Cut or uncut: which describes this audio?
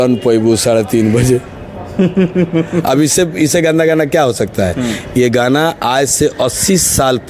uncut